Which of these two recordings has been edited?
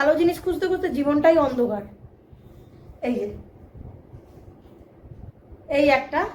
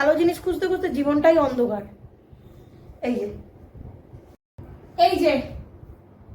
second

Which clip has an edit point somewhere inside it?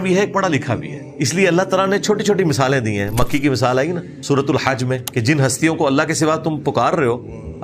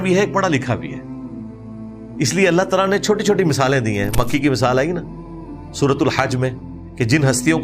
first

